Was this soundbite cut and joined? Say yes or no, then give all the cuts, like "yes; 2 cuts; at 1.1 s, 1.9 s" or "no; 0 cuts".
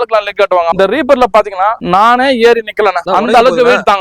yes; 3 cuts; at 0.7 s, 1.8 s, 3.0 s